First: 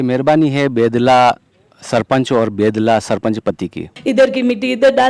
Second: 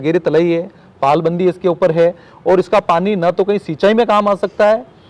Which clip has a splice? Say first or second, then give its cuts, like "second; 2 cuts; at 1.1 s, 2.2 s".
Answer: first; 1 cut; at 3.9 s